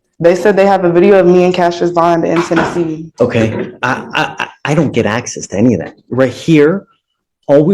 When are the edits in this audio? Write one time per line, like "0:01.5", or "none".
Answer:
0:03.1